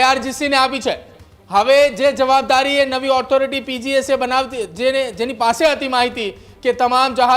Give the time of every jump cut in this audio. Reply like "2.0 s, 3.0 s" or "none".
none